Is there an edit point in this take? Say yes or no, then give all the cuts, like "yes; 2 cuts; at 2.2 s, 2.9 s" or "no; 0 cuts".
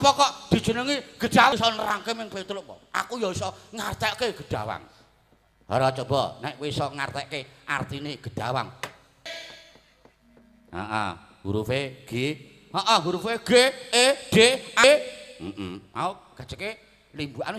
yes; 3 cuts; at 1.5 s, 9.2 s, 14.8 s